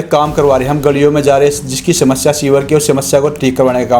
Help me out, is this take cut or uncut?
uncut